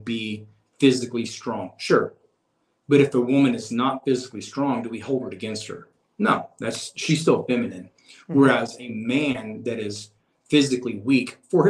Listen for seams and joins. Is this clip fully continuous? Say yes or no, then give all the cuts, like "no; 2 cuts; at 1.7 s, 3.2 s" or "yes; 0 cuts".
yes; 0 cuts